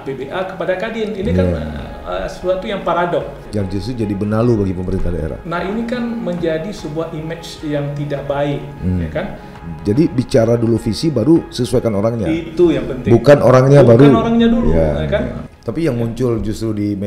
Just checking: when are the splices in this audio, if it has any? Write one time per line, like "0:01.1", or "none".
0:03.4
0:09.6
0:15.4